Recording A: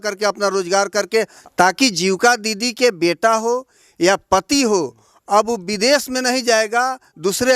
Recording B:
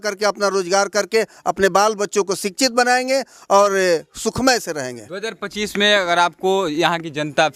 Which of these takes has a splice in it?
A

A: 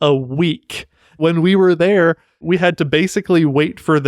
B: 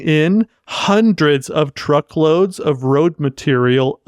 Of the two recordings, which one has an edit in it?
A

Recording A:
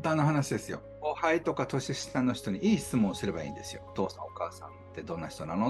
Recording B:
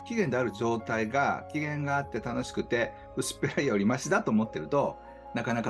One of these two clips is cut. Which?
A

